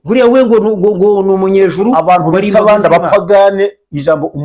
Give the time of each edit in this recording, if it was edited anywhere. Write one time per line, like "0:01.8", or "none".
none